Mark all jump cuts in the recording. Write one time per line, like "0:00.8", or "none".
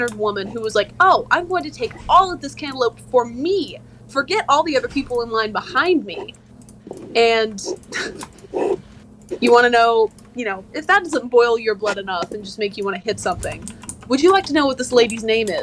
none